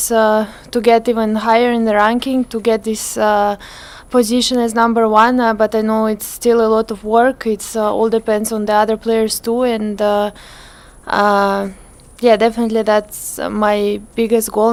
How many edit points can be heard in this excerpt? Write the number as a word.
zero